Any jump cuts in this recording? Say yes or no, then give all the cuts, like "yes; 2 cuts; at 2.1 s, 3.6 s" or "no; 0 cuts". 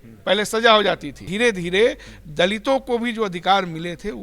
yes; 1 cut; at 1.2 s